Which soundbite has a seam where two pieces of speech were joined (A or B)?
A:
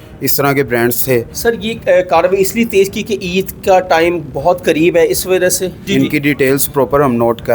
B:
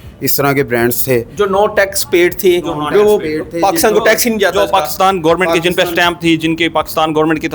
A